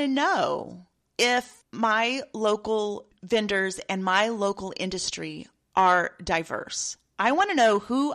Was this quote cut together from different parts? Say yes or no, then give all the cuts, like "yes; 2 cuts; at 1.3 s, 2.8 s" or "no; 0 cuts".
yes; 2 cuts; at 1.6 s, 3.1 s